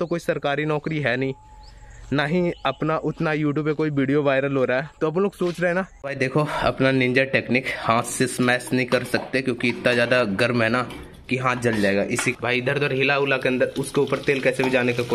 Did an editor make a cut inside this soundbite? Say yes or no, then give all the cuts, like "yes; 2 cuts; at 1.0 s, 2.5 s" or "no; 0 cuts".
yes; 2 cuts; at 6.0 s, 12.3 s